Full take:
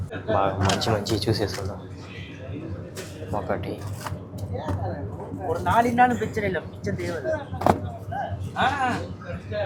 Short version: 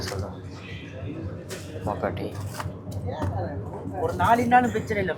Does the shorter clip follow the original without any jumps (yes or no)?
yes